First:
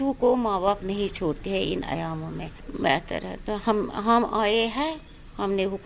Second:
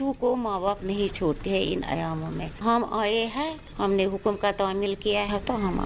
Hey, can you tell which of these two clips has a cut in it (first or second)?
second